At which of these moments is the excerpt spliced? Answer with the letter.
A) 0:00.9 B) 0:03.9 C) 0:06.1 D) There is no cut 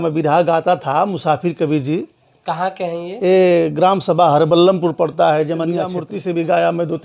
C